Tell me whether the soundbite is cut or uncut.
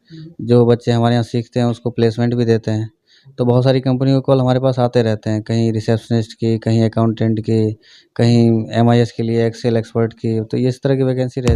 uncut